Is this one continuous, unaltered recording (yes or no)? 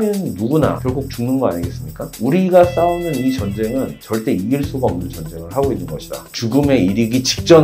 no